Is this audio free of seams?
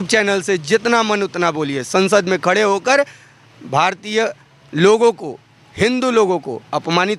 yes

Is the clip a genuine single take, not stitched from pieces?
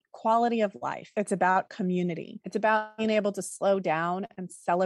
yes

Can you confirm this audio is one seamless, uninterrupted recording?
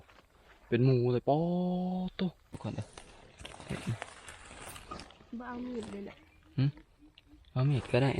no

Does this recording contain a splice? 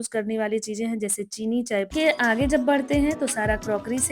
yes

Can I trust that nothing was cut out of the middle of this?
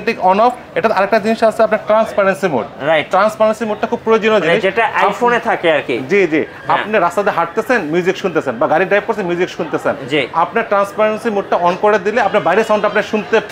yes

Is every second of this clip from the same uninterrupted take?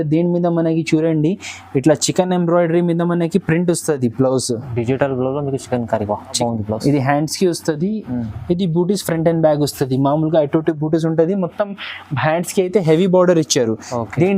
no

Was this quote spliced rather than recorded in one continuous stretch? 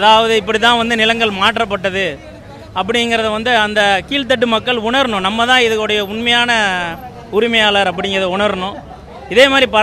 no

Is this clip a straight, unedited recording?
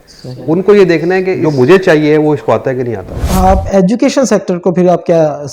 no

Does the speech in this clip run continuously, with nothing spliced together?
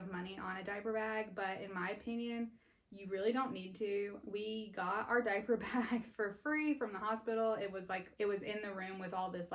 yes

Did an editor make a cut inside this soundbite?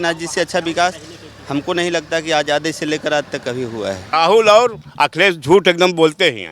yes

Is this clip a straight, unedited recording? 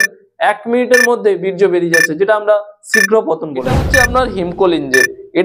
no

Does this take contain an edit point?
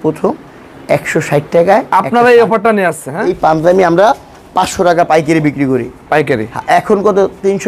yes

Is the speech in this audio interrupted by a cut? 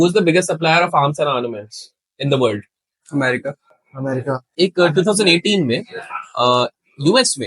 yes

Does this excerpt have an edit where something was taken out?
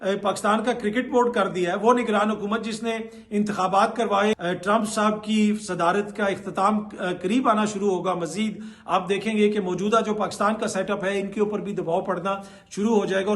yes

